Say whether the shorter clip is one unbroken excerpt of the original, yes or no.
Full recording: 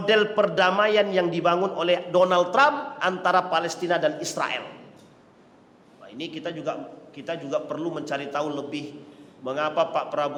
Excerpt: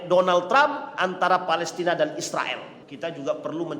no